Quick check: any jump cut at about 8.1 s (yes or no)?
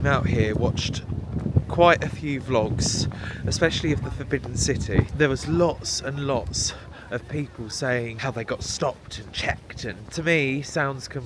yes